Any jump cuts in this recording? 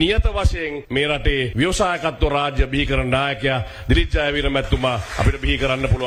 no; 0 cuts

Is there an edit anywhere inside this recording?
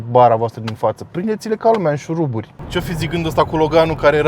yes; 1 cut; at 2.5 s

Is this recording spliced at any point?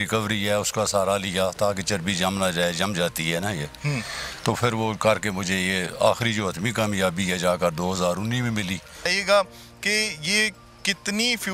yes; 1 cut; at 9.2 s

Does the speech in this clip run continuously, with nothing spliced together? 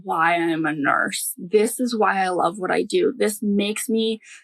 yes; 0 cuts

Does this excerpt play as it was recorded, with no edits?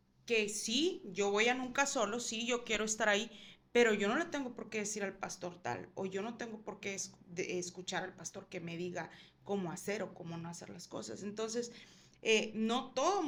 yes; 0 cuts

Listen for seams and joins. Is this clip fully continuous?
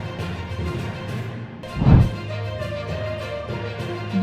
no; 1 cut; at 1.5 s

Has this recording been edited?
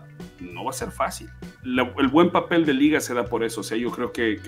no; 0 cuts

